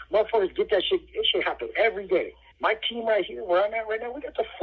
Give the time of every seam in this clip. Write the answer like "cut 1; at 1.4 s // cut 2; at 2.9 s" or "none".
cut 1; at 2.4 s